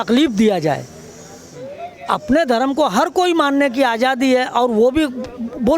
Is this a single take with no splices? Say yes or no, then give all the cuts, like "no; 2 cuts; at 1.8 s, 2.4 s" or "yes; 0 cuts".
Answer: yes; 0 cuts